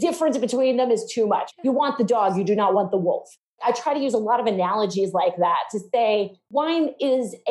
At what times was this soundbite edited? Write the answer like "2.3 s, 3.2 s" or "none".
1.5 s, 3.5 s, 6.4 s